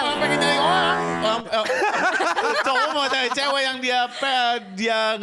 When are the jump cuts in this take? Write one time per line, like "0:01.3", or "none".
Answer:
none